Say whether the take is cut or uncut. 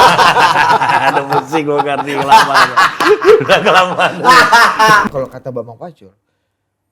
cut